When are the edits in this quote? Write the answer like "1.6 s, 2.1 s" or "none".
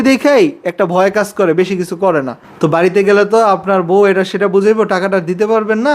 2.4 s